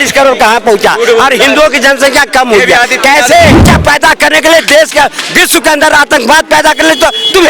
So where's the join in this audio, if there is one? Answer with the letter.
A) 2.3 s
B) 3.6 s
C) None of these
B